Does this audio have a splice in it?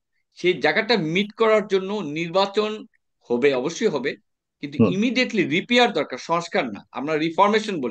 no; 0 cuts

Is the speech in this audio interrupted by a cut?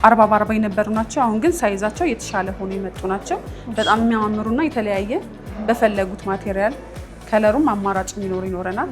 no; 0 cuts

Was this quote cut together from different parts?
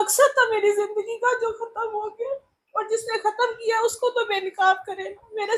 no; 0 cuts

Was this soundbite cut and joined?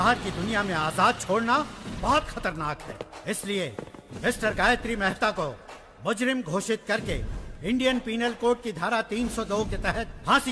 no; 0 cuts

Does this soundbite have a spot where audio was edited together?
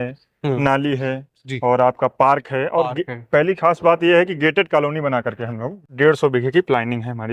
yes; 1 cut; at 5.7 s

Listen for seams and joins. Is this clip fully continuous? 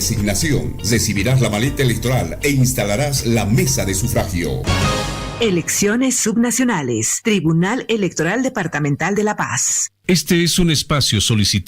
no; 1 cut; at 9.9 s

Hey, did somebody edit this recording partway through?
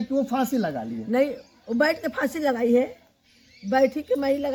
no; 0 cuts

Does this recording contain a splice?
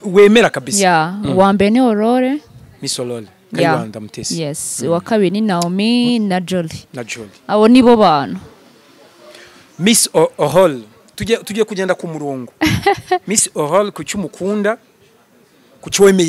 no; 0 cuts

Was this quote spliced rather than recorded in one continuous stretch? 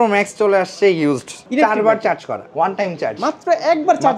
yes; 2 cuts; at 1.4 s, 2.5 s

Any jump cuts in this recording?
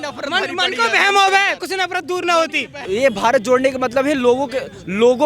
yes; 1 cut; at 2.8 s

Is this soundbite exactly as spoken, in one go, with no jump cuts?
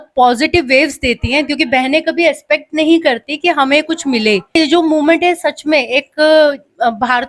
no; 1 cut; at 4.5 s

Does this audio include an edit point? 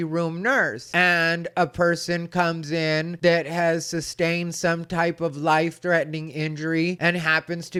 no; 0 cuts

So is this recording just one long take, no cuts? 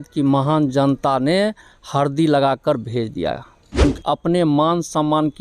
no; 1 cut; at 3.8 s

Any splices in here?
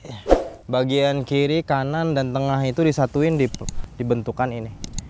no; 0 cuts

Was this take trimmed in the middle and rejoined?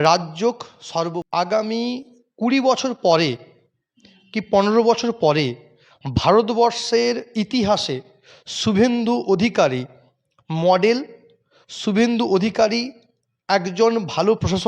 yes; 1 cut; at 1.2 s

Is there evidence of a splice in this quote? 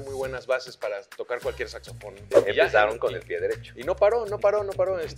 yes; 1 cut; at 2.3 s

